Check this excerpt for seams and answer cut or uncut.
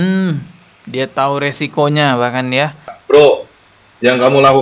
cut